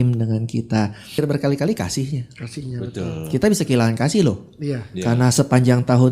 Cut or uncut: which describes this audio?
cut